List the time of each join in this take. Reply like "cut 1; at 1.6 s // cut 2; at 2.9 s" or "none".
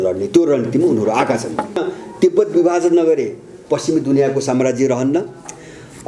cut 1; at 1.8 s